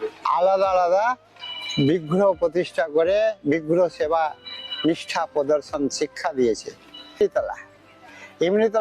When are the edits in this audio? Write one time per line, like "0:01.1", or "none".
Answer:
0:07.2